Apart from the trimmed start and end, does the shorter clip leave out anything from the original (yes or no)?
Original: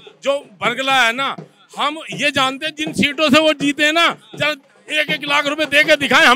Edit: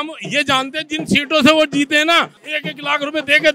yes